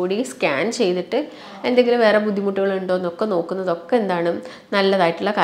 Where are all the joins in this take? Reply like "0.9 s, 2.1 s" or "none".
none